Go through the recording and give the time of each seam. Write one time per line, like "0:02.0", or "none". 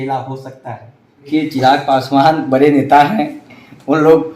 0:01.3